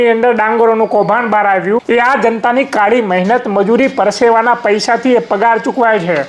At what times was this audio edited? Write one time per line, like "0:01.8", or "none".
0:01.8